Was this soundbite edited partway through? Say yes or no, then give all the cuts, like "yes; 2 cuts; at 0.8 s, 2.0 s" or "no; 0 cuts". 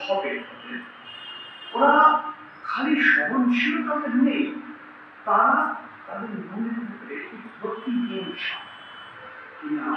no; 0 cuts